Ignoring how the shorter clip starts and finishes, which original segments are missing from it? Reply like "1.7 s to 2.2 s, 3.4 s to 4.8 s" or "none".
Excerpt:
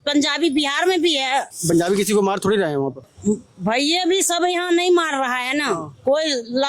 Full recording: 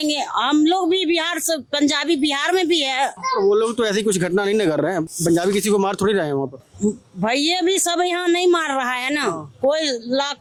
3.2 s to 5.1 s